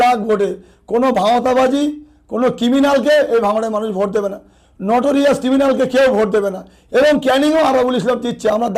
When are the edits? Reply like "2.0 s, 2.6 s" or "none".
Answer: none